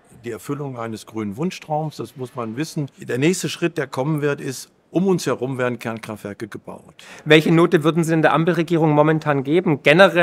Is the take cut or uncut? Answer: cut